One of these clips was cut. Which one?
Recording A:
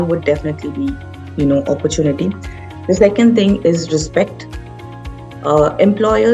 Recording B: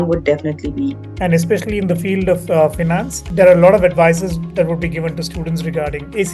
B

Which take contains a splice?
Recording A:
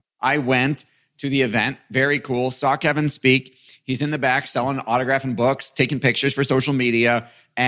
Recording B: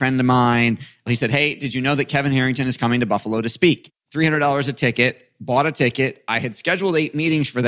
B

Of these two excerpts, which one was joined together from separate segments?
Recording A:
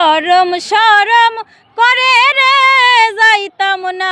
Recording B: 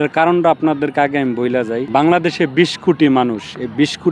B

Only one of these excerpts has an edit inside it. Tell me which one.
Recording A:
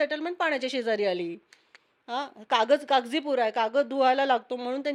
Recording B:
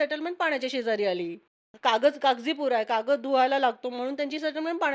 B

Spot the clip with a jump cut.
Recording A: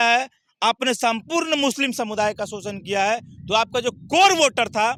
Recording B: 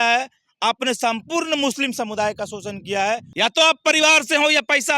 B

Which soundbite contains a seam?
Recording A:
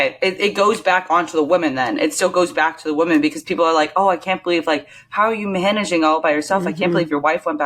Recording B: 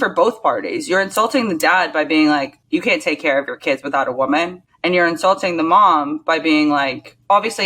B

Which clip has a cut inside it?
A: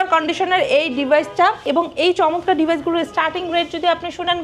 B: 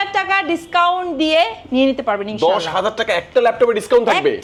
A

